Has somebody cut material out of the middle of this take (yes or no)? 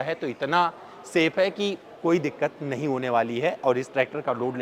no